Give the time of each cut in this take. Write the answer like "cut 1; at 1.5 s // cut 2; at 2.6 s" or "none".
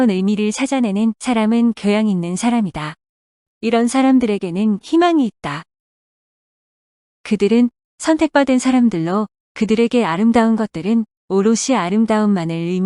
cut 1; at 11.9 s